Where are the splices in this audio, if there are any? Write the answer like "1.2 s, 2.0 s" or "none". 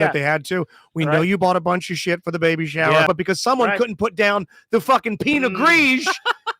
3.1 s